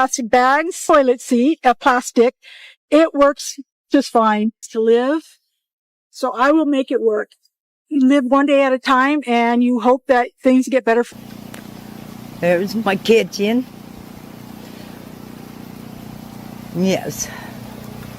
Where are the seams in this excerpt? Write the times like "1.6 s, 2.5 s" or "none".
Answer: 0.8 s, 4.7 s, 11.1 s